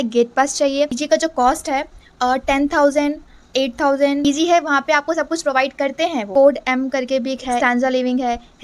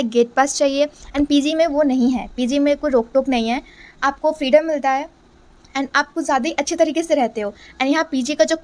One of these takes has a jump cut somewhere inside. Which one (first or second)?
first